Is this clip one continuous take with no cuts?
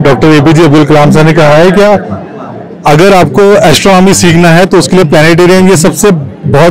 yes; 0 cuts

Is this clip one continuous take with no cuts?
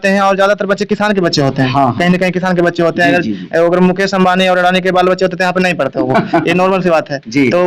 yes; 0 cuts

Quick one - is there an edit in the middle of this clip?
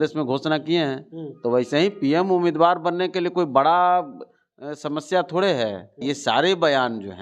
yes; 1 cut; at 6.0 s

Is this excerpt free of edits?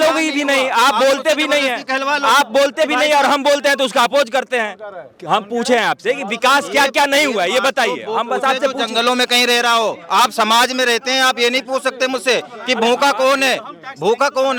yes; 0 cuts

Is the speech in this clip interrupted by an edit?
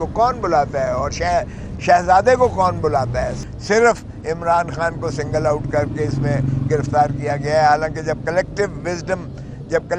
yes; 1 cut; at 3.4 s

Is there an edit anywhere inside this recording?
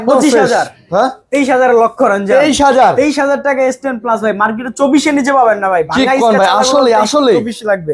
no; 0 cuts

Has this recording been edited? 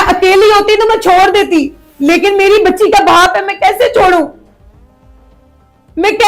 no; 0 cuts

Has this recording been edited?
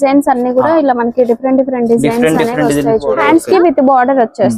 yes; 1 cut; at 3.2 s

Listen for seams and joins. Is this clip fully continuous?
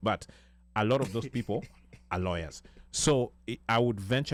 yes; 0 cuts

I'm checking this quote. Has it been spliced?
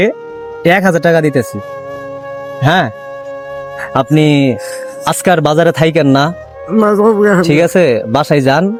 no; 0 cuts

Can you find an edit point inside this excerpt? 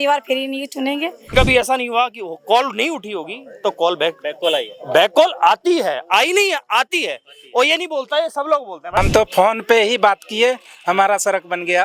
yes; 2 cuts; at 1.3 s, 9.0 s

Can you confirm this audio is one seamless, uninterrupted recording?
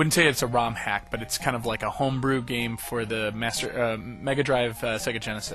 no; 1 cut; at 3.2 s

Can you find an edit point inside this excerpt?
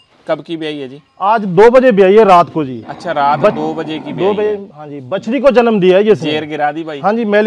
no; 0 cuts

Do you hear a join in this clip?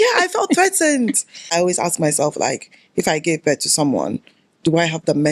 yes; 1 cut; at 1.4 s

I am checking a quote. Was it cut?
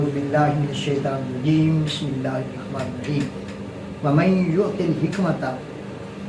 no; 0 cuts

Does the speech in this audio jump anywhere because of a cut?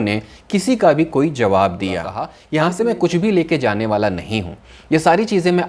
yes; 1 cut; at 2.4 s

